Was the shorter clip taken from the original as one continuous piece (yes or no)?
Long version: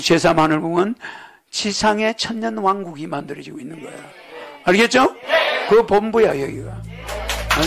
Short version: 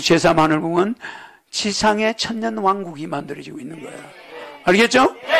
yes